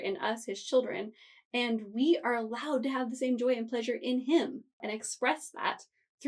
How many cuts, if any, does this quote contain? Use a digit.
1